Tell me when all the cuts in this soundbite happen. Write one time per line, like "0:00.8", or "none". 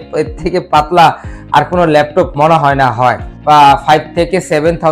0:03.3